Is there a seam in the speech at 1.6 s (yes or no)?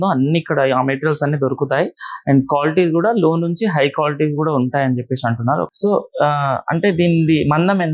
no